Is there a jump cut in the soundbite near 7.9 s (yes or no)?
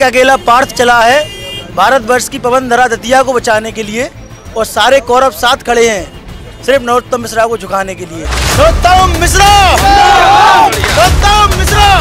no